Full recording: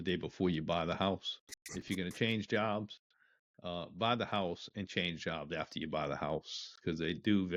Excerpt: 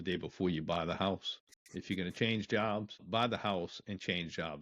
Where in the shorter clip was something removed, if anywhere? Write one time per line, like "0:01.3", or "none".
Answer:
0:03.0